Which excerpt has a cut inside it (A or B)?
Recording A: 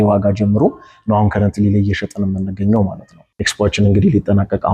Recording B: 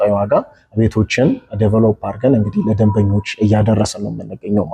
A